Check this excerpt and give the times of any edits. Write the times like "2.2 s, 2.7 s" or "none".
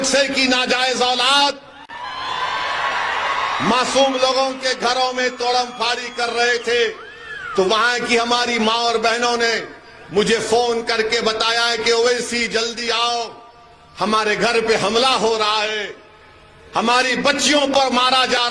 none